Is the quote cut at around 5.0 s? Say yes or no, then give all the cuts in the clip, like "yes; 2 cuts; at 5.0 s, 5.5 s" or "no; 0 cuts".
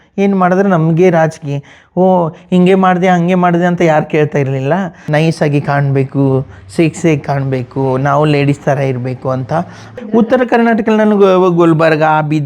yes; 2 cuts; at 5.0 s, 10.0 s